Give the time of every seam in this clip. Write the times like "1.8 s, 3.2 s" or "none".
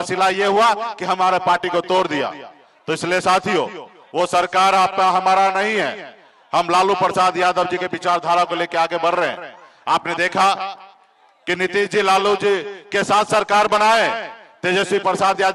none